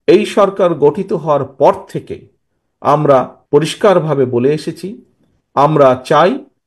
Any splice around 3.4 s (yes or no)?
yes